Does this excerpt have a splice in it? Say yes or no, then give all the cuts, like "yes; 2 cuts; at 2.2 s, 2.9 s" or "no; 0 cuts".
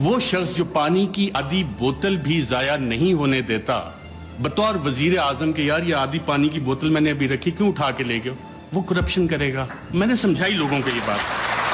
yes; 1 cut; at 1.4 s